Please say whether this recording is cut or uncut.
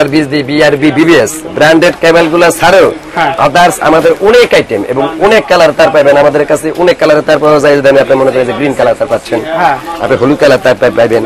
uncut